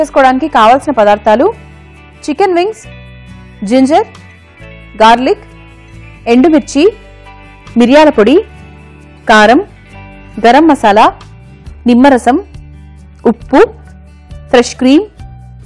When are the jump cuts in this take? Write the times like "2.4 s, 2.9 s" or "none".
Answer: none

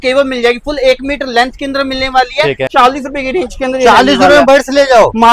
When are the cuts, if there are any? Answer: 2.7 s

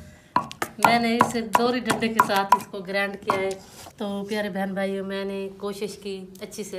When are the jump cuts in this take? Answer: 3.7 s

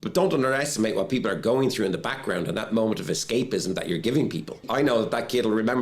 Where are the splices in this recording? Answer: 4.7 s

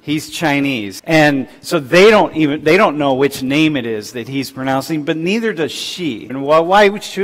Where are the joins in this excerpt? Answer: 0.9 s, 6.3 s

